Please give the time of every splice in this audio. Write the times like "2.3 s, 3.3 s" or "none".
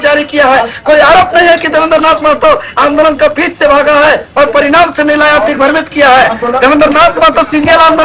none